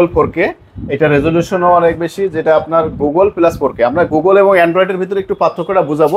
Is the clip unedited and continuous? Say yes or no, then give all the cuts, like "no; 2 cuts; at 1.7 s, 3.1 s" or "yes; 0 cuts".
yes; 0 cuts